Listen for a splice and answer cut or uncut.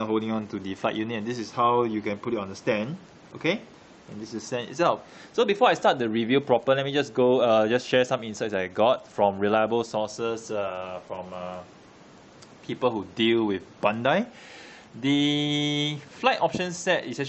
cut